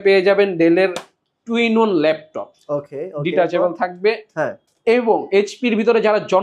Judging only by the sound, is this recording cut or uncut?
uncut